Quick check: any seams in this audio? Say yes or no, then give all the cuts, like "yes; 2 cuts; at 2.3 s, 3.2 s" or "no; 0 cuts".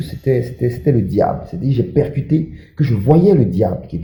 no; 0 cuts